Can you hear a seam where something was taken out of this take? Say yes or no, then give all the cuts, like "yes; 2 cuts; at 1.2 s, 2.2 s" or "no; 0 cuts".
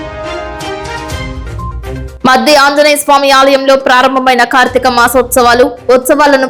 no; 0 cuts